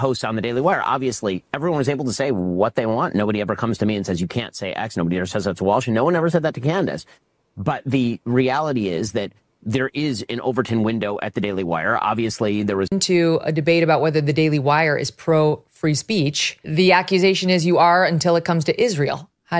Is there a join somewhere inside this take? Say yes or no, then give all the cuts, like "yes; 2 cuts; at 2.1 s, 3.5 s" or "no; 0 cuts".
yes; 1 cut; at 12.9 s